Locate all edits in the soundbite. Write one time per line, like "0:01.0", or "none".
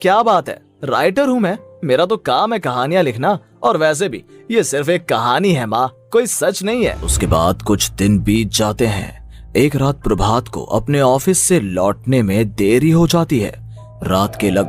0:07.1

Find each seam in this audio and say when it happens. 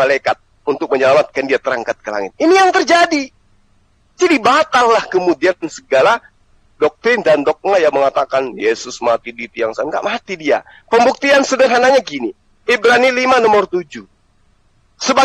none

